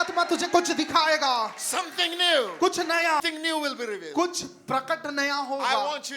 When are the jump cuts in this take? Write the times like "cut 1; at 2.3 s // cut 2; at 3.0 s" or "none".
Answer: cut 1; at 3.2 s